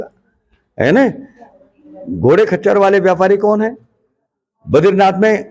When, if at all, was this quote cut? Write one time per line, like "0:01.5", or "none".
none